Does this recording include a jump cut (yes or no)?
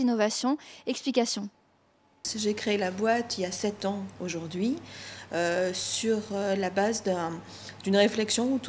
yes